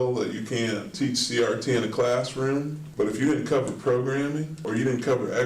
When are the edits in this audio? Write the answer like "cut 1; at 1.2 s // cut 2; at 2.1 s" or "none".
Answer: cut 1; at 0.9 s // cut 2; at 2.8 s // cut 3; at 4.6 s